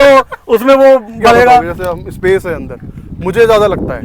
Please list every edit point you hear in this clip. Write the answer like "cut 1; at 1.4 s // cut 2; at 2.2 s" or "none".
cut 1; at 1.8 s